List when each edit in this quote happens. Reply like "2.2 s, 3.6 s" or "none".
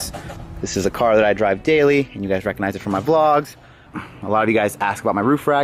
none